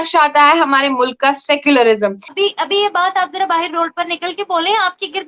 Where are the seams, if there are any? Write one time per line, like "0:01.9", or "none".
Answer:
0:02.2

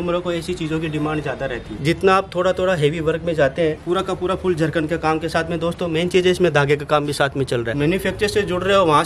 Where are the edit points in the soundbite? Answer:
0:01.7
0:03.8
0:07.7

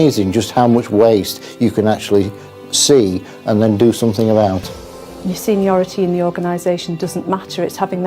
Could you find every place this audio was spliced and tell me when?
0:05.0

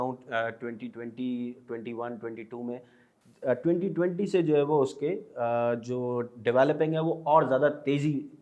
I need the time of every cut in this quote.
none

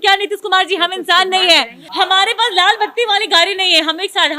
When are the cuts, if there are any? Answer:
0:01.8

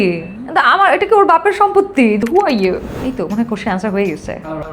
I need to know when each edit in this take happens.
0:02.2
0:02.9

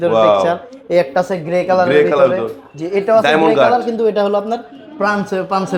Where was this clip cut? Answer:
none

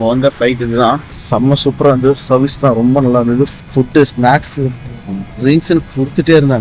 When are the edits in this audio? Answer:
0:01.1
0:03.6

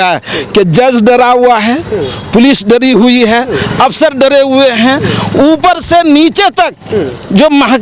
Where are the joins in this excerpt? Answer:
none

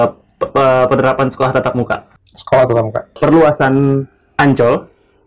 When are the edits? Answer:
0:03.2

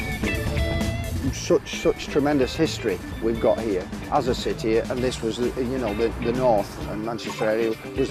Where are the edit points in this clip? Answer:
0:05.3

